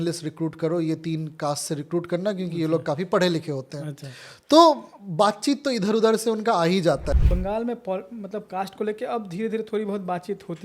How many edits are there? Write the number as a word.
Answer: one